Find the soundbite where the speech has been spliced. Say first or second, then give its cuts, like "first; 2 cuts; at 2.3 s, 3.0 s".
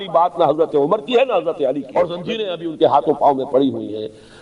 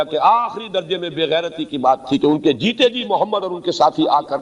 first; 1 cut; at 1.8 s